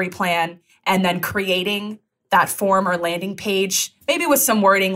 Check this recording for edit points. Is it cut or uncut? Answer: uncut